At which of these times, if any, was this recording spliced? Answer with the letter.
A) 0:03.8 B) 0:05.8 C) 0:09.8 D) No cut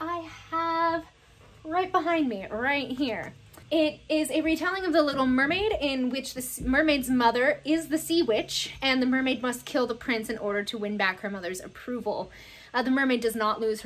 A